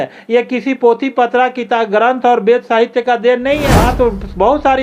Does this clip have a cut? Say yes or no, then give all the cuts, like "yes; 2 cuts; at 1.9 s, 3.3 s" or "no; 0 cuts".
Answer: yes; 1 cut; at 3.8 s